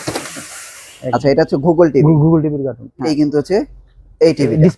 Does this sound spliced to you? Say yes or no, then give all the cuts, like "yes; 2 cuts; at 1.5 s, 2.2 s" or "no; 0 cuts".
yes; 1 cut; at 3.1 s